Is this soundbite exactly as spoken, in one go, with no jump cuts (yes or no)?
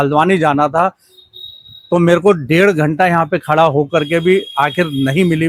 yes